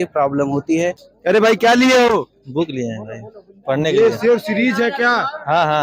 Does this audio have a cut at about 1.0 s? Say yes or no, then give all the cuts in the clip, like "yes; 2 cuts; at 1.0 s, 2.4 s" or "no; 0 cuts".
yes; 1 cut; at 1.0 s